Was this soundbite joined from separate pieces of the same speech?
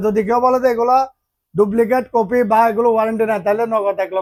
no; 0 cuts

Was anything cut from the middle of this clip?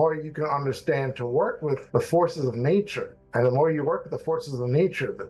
yes; 1 cut; at 1.8 s

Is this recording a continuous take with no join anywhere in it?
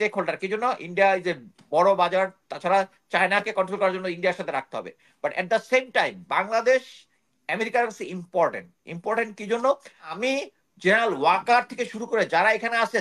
no; 1 cut; at 10.1 s

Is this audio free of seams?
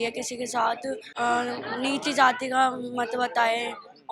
no; 1 cut; at 1.1 s

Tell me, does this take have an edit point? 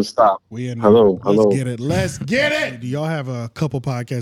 yes; 1 cut; at 2.8 s

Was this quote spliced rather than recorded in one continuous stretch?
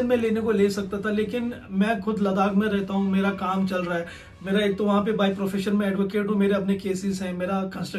no; 0 cuts

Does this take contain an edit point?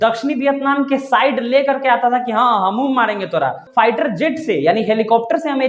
yes; 1 cut; at 3.6 s

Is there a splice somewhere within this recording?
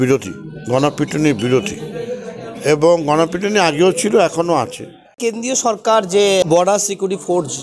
yes; 2 cuts; at 5.2 s, 6.5 s

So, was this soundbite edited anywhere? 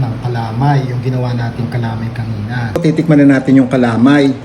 yes; 1 cut; at 2.8 s

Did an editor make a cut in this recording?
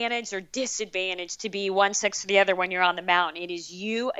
no; 0 cuts

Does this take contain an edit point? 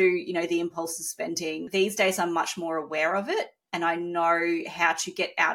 yes; 1 cut; at 1.6 s

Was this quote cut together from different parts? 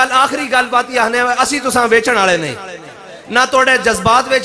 no; 0 cuts

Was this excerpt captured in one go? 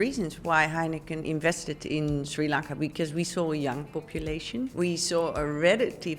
no; 1 cut; at 4.7 s

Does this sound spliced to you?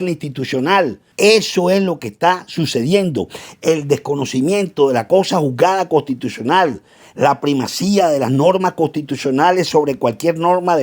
yes; 1 cut; at 1.0 s

